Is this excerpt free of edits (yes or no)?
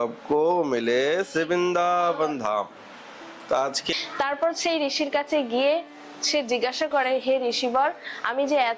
no